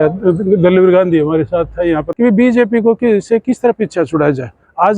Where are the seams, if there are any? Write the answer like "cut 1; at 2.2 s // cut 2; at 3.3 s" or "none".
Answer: cut 1; at 2.1 s